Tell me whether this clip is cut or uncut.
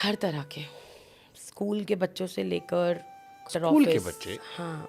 cut